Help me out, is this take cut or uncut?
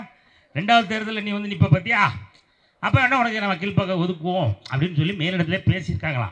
uncut